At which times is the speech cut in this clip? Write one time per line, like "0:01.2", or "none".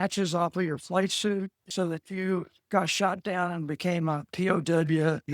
0:01.7